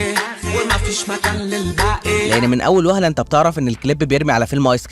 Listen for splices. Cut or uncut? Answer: cut